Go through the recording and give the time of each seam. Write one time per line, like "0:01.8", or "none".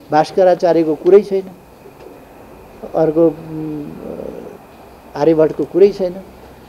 none